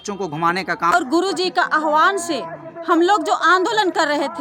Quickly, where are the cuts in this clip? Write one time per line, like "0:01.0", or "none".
0:00.9